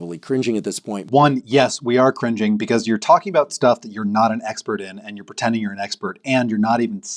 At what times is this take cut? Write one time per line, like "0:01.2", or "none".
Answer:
0:01.0